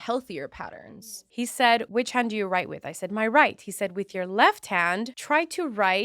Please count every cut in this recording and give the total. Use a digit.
3